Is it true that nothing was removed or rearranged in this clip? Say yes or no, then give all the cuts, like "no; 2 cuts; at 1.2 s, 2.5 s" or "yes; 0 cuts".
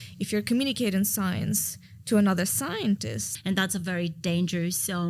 no; 1 cut; at 3.3 s